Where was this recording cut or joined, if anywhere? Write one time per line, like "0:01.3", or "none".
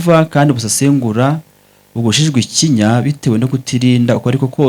none